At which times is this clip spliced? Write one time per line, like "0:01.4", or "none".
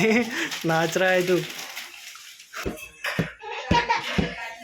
0:02.5